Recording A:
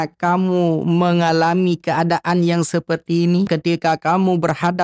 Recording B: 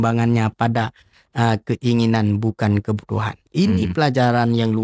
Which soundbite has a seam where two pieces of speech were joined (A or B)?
A